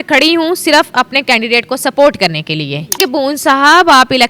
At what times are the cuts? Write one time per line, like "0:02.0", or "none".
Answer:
0:03.0

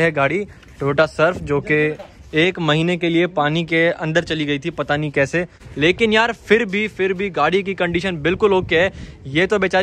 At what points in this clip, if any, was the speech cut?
0:05.6

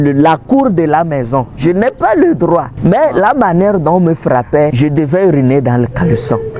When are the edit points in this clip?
0:02.7
0:04.7

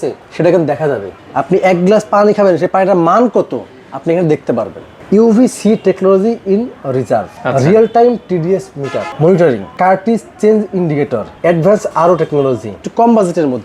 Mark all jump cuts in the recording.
0:01.2
0:04.9
0:07.4
0:09.0
0:09.7
0:11.3
0:12.8

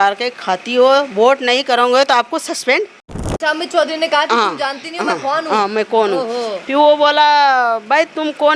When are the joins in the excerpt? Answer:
0:03.2

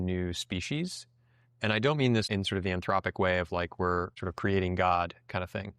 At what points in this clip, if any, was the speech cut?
0:02.3
0:04.2

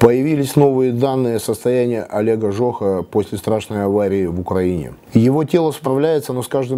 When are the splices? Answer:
0:05.0

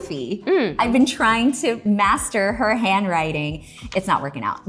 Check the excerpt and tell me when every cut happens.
0:00.7
0:01.8

